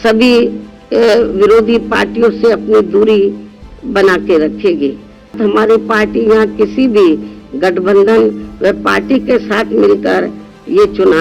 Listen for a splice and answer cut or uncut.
cut